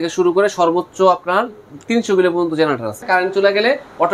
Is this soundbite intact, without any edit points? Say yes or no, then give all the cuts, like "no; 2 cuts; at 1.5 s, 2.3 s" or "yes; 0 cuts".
no; 1 cut; at 3.0 s